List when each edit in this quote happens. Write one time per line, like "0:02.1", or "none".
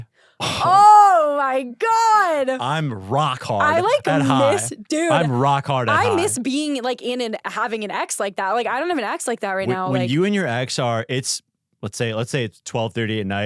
none